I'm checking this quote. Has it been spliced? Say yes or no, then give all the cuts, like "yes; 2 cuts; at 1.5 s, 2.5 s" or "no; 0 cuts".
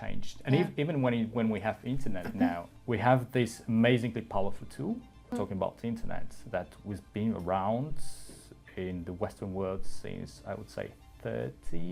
yes; 2 cuts; at 2.7 s, 5.3 s